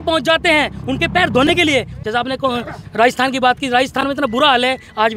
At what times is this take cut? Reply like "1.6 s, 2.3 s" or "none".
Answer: 2.0 s

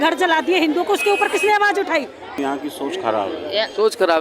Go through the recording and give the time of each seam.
2.4 s

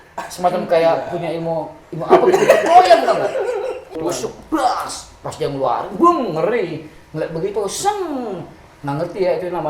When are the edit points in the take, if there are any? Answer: 3.9 s

